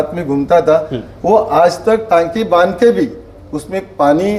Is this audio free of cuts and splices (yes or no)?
yes